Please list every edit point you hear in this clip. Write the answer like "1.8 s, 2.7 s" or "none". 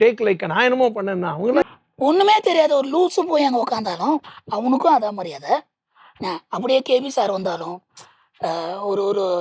1.6 s